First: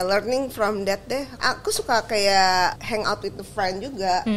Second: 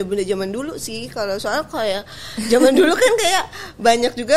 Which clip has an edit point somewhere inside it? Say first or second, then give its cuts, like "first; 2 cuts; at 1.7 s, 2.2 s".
first; 2 cuts; at 1.4 s, 2.8 s